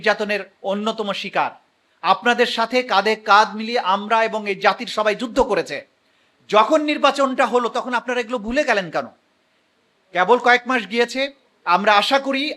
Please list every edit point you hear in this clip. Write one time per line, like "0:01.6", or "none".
none